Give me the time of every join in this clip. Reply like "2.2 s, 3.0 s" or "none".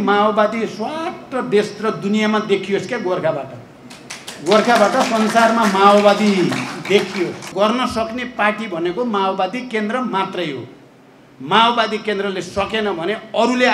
7.5 s